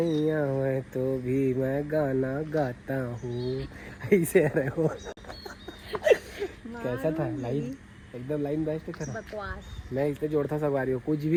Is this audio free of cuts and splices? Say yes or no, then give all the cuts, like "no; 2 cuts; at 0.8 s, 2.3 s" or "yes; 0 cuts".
yes; 0 cuts